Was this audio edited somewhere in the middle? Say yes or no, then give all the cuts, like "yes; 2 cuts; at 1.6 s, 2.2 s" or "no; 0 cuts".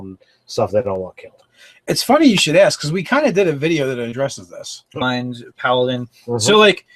no; 0 cuts